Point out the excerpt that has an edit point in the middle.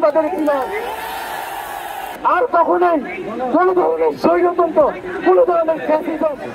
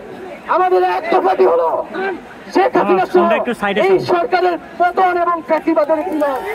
first; 1 cut; at 2.0 s

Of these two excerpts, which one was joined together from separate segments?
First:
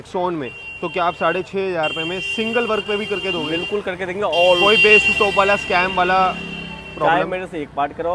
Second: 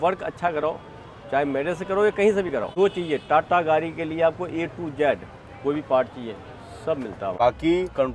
second; 2 cuts; at 2.7 s, 7.3 s

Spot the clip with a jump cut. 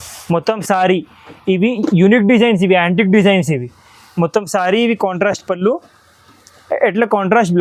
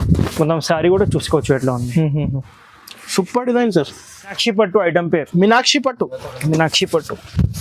second; 1 cut; at 4.4 s

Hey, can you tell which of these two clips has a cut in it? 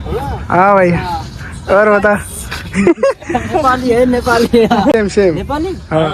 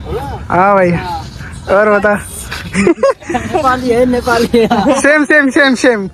first; 1 cut; at 4.9 s

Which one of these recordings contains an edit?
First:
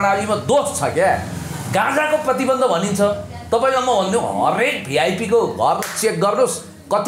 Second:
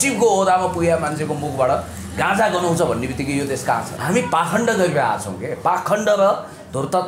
second; 1 cut; at 3.9 s

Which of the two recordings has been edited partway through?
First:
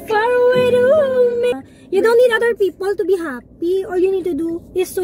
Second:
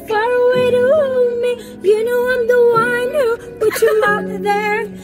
first; 1 cut; at 1.7 s

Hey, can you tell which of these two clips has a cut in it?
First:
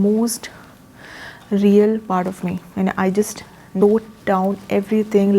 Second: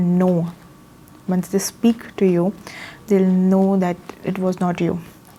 first; 1 cut; at 3.6 s

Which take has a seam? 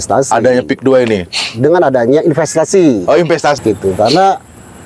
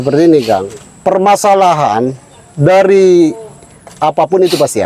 first; 1 cut; at 3.6 s

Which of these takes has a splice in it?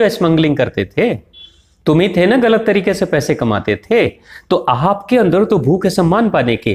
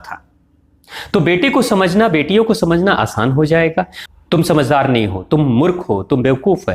second; 1 cut; at 4.0 s

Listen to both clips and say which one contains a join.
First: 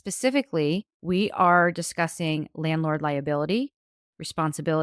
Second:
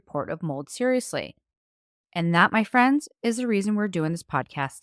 first; 1 cut; at 0.9 s

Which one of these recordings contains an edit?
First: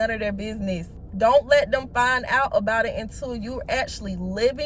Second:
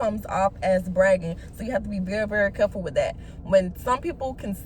first; 1 cut; at 1.0 s

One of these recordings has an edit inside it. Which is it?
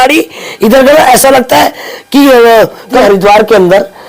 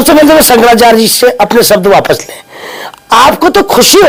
first; 1 cut; at 3.0 s

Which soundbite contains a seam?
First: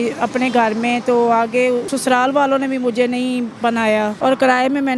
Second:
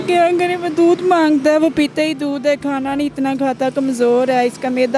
first; 2 cuts; at 1.9 s, 3.8 s

